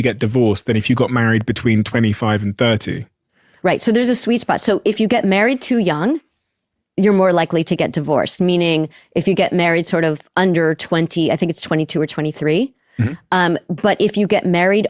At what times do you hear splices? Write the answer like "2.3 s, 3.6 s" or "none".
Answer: none

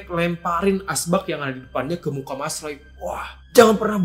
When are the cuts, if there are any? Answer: none

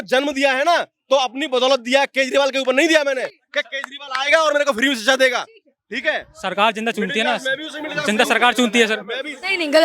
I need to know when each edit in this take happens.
none

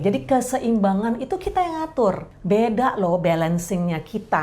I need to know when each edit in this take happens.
2.3 s

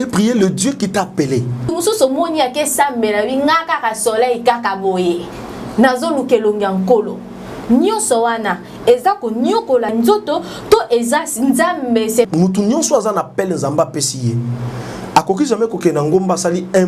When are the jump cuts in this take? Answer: 1.7 s, 12.3 s

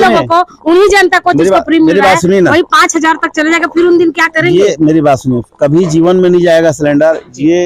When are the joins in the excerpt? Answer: none

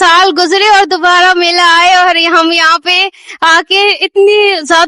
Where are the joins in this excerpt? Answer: none

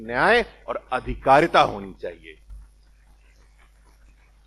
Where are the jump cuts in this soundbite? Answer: none

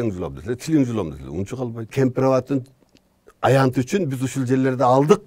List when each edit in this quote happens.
1.9 s

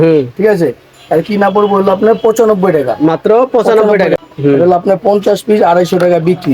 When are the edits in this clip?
4.3 s

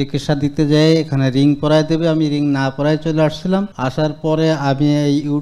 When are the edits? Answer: none

